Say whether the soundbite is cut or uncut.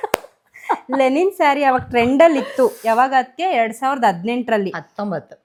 uncut